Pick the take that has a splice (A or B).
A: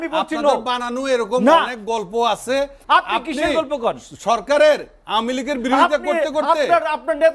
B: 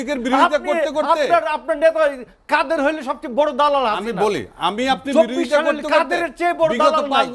A